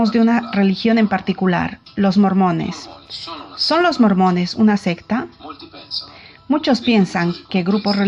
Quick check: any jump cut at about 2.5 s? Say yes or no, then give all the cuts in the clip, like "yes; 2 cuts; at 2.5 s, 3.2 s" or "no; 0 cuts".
no; 0 cuts